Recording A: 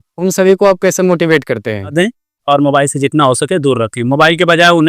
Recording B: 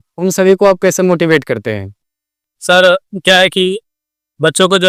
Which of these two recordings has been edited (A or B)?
A